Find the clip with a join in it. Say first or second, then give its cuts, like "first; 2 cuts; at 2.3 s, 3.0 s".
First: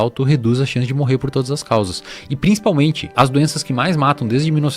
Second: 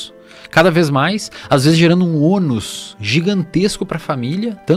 first; 1 cut; at 3.1 s